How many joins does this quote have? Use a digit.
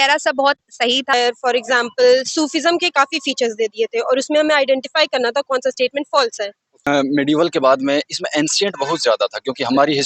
2